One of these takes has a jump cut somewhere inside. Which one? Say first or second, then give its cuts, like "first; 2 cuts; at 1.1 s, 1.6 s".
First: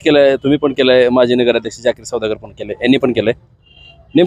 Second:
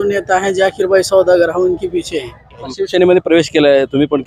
second; 1 cut; at 2.6 s